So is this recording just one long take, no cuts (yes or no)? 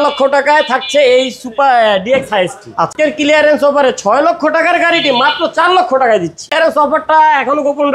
no